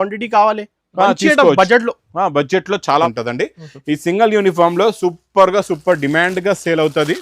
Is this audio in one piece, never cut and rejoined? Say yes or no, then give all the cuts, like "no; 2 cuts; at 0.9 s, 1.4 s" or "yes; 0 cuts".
no; 1 cut; at 3.1 s